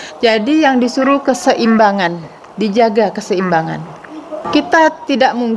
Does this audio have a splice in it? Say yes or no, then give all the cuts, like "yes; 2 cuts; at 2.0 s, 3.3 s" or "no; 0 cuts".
yes; 1 cut; at 4.4 s